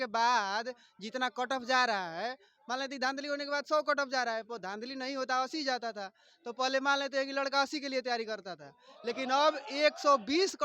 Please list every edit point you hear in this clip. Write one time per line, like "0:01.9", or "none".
none